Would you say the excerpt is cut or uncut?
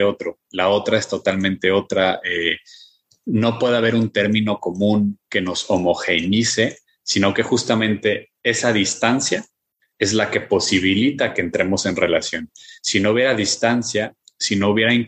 uncut